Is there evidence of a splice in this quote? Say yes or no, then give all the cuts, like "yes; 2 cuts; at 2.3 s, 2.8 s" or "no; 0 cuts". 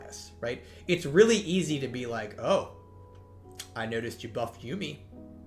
no; 0 cuts